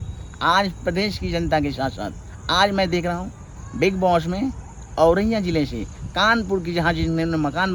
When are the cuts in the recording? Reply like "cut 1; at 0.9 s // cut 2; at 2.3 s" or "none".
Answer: none